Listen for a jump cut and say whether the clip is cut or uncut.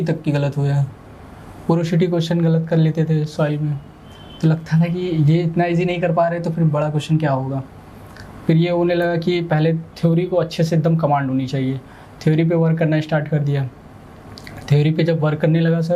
uncut